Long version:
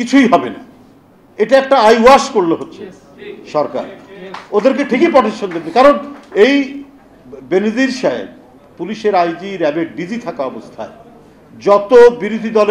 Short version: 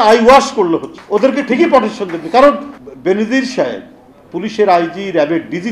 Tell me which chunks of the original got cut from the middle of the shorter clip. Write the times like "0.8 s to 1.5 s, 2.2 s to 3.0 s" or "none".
2.7 s to 4.4 s, 6.2 s to 7.2 s